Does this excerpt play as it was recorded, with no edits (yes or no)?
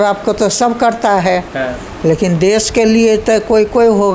yes